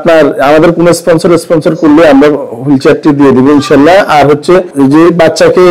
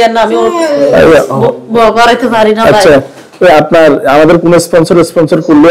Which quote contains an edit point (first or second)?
first